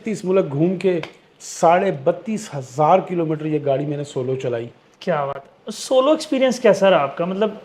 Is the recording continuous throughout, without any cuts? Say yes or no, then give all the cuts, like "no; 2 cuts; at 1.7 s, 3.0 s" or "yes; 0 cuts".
yes; 0 cuts